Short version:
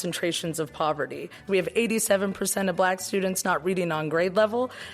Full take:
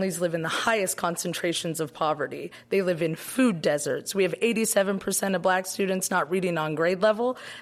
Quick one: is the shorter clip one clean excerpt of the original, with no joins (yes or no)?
no